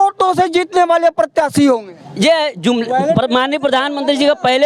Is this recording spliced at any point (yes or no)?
no